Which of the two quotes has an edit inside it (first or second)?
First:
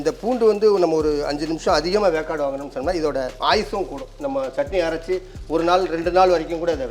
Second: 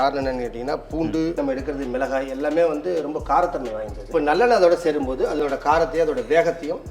second